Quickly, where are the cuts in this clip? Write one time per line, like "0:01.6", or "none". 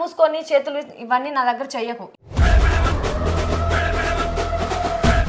none

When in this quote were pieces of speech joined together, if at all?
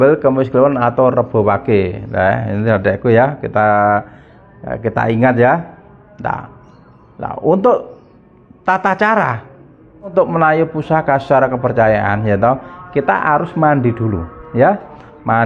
0:10.1

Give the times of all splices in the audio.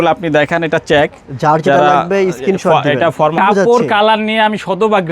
0:03.4

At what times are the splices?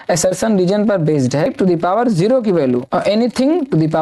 0:01.5

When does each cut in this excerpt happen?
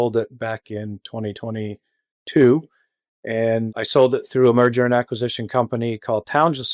0:03.7

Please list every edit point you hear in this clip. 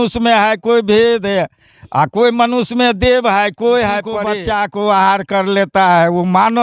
0:04.2

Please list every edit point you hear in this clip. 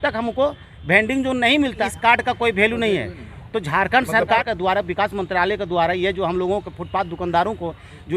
0:01.8
0:04.4

